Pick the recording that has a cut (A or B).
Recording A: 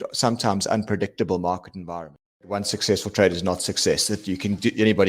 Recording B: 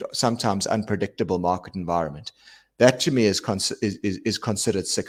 A